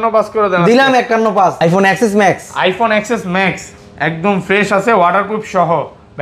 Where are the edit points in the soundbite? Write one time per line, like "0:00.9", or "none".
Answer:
0:01.5